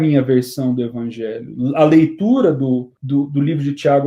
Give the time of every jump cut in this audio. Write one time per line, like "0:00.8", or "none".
0:02.9